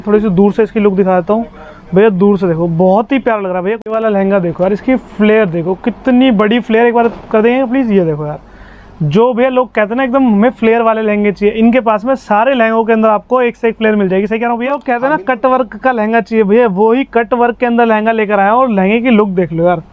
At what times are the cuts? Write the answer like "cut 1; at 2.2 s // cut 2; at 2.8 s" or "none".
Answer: cut 1; at 3.7 s // cut 2; at 14.6 s